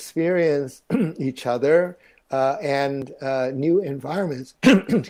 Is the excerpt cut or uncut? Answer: uncut